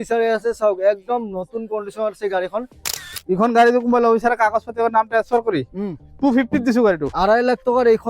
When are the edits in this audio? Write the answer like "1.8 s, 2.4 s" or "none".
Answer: 3.2 s